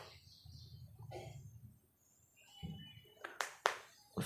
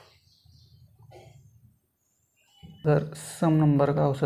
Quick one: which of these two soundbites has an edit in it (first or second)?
second